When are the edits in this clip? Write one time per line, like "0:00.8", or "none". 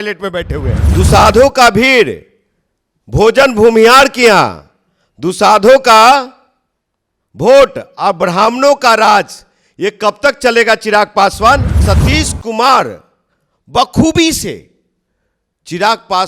0:00.9
0:11.8

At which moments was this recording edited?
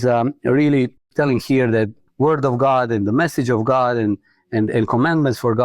0:01.0
0:02.0

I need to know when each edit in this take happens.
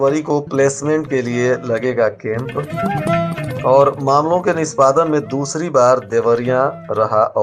none

